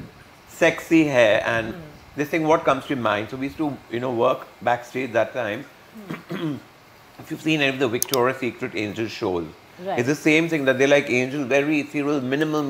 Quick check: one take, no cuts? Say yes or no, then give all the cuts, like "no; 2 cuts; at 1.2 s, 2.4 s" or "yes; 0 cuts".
yes; 0 cuts